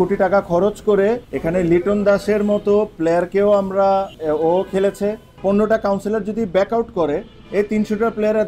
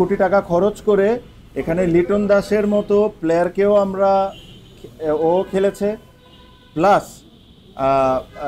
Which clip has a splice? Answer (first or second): first